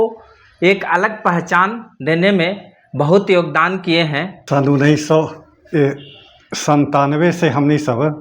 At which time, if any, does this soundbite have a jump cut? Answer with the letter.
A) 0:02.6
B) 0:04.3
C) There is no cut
B